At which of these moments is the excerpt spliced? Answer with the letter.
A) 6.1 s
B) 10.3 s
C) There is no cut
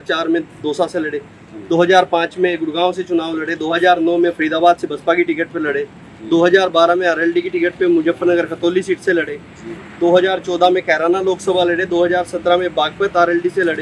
C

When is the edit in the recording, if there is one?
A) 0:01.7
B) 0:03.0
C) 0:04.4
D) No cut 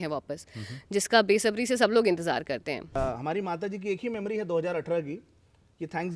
B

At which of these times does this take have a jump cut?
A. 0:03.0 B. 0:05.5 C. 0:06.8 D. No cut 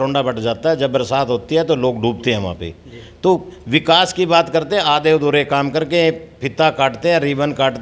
D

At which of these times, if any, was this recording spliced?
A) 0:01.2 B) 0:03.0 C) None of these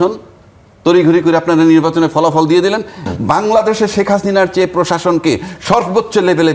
B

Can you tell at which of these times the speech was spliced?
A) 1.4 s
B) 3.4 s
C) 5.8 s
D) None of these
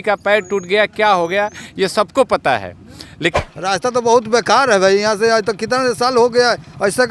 B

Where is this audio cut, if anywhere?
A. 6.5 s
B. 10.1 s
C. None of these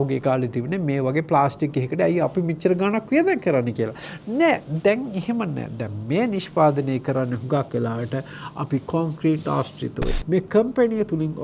B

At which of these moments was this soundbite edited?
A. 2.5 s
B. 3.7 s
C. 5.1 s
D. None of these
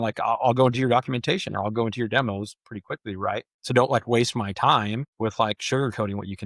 C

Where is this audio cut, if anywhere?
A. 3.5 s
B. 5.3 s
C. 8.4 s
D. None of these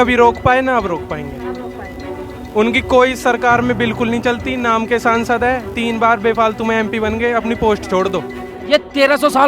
C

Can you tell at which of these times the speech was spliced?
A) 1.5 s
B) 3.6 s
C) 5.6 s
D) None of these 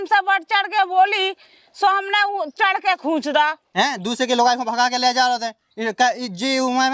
B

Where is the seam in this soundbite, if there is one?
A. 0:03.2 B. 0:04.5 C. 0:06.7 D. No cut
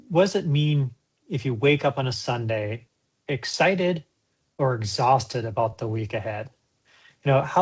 D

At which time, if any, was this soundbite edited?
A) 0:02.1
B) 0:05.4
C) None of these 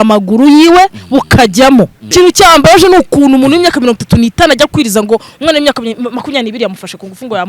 A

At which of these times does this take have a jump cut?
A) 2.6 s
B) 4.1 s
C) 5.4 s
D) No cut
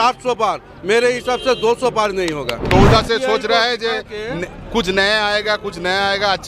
A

